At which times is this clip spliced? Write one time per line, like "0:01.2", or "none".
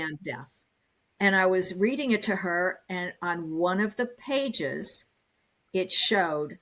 0:01.0